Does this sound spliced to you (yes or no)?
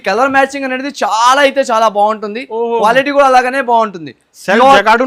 no